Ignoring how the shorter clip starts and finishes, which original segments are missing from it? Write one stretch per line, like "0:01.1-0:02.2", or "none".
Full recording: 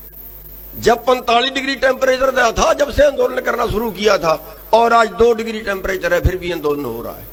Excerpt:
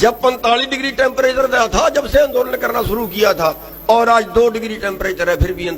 none